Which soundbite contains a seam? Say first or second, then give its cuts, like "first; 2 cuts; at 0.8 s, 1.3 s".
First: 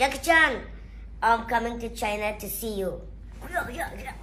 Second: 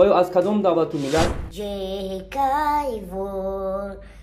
second; 1 cut; at 1.4 s